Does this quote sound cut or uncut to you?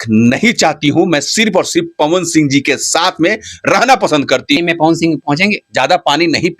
cut